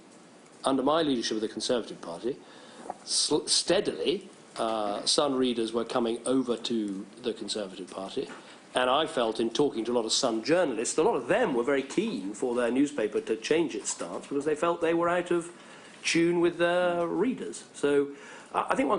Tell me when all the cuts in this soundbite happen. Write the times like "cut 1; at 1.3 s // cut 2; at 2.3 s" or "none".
cut 1; at 6.8 s